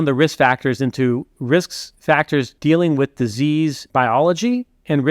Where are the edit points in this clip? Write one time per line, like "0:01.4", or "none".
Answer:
0:02.2
0:03.8